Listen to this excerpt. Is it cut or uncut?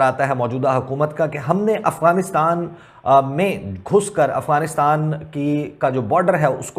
uncut